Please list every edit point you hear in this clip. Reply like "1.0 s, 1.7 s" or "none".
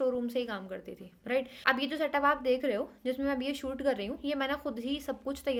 none